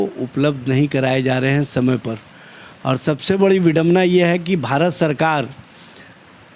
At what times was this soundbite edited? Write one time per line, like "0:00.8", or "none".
none

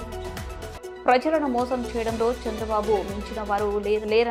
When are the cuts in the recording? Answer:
none

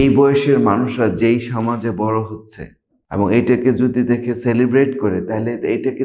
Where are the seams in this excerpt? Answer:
none

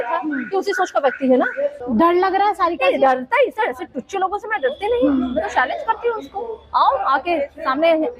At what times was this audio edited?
0:01.8

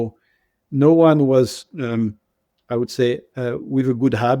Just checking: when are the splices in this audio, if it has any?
none

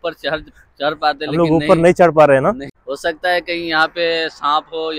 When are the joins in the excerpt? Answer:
0:02.7

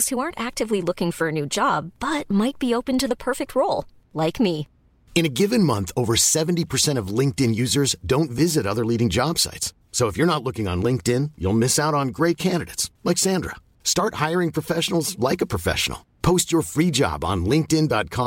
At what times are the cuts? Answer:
none

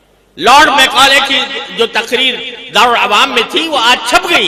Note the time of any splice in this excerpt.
none

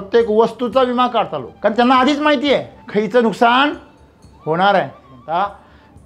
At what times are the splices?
0:01.4
0:02.8
0:05.1

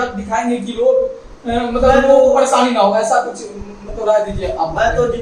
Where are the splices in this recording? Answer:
none

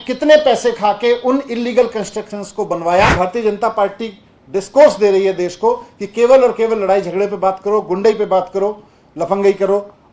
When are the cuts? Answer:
0:03.1

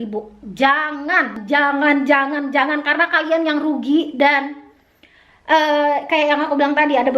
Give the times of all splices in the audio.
0:01.4

